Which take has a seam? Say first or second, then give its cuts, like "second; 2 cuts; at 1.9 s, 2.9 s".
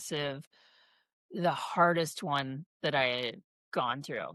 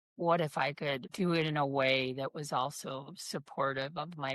second; 1 cut; at 1.1 s